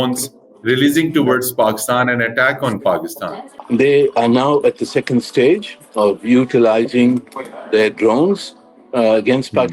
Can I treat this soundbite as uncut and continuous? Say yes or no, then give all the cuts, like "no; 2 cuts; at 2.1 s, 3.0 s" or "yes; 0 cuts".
no; 1 cut; at 3.5 s